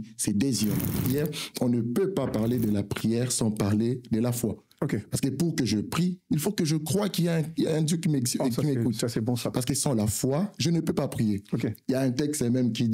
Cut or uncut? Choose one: cut